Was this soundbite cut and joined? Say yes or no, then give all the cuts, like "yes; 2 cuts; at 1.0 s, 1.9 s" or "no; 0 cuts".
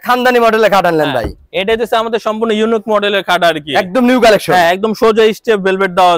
no; 0 cuts